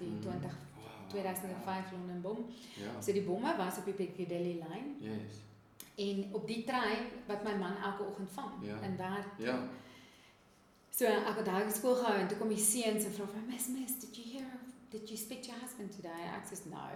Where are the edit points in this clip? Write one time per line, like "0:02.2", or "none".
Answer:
none

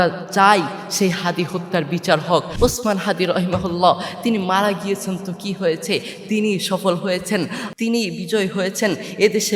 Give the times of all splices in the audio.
0:02.5
0:07.6

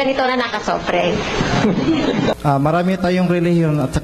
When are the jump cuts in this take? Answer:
0:02.3

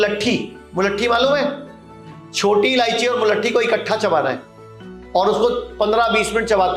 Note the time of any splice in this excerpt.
none

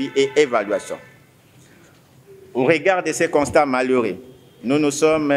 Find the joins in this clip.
none

